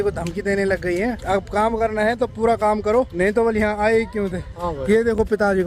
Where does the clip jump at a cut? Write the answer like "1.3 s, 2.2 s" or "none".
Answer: none